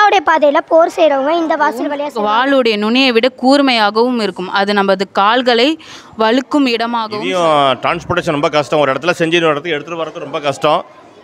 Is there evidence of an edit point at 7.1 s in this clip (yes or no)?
yes